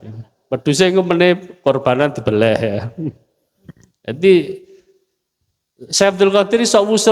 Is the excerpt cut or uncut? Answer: uncut